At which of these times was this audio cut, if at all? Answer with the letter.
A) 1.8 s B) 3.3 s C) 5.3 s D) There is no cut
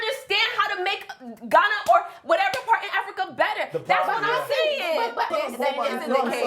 C